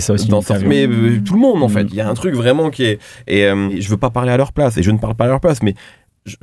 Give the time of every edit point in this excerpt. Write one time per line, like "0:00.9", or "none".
0:03.8